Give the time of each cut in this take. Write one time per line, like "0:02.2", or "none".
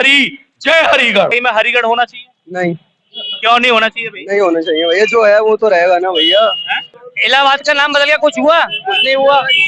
0:01.3
0:06.8